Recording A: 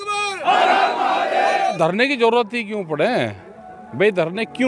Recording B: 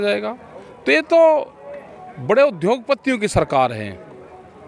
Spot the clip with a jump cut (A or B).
A